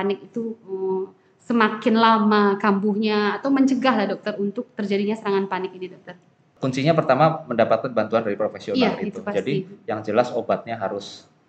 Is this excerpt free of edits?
no; 1 cut; at 6.5 s

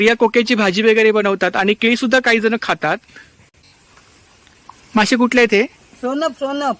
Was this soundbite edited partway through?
yes; 1 cut; at 3.9 s

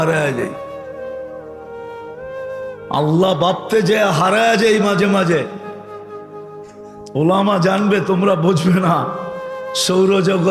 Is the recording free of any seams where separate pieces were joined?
yes; 0 cuts

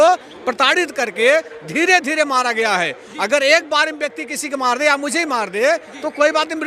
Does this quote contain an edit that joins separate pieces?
no; 0 cuts

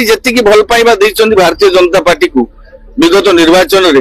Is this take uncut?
yes; 0 cuts

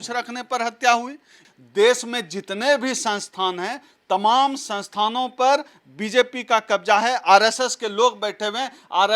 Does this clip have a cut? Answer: yes; 1 cut; at 1.4 s

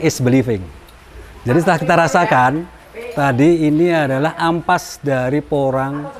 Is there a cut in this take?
no; 0 cuts

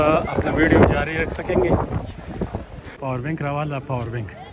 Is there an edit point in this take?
yes; 1 cut; at 2.8 s

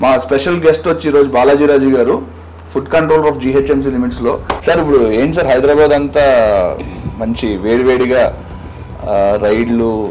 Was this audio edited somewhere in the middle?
yes; 1 cut; at 4.5 s

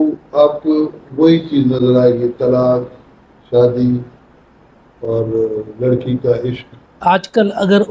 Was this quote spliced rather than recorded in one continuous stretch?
yes; 1 cut; at 7.0 s

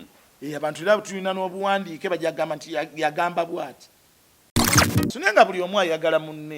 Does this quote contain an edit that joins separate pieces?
yes; 1 cut; at 4.8 s

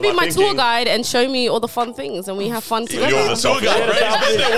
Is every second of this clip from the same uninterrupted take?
yes; 0 cuts

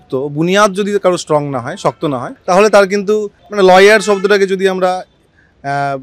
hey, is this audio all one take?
no; 2 cuts; at 2.3 s, 3.4 s

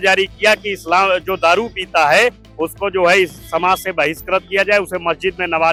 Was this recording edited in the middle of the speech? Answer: no; 0 cuts

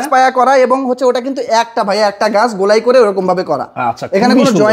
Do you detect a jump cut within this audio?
no; 0 cuts

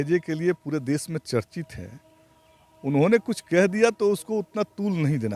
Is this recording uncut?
yes; 0 cuts

